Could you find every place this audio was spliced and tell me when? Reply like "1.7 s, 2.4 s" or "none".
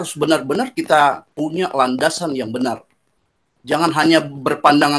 none